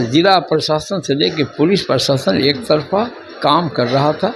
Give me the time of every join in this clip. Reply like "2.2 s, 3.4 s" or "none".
none